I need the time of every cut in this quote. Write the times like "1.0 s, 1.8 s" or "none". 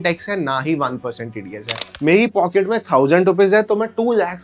1.9 s